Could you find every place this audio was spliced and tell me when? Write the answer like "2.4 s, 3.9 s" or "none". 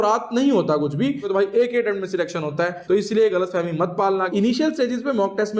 1.3 s, 4.3 s